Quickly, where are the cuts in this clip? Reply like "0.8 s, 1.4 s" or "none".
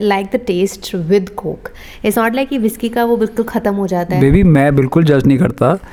none